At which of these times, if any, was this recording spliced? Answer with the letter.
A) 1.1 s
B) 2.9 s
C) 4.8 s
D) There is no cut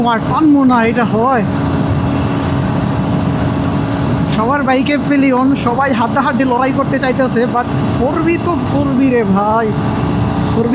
D